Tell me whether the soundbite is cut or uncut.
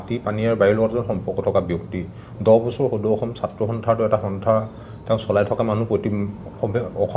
uncut